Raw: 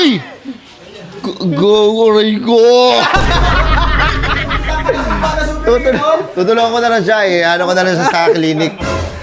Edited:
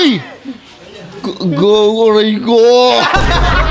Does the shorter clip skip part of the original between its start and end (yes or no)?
no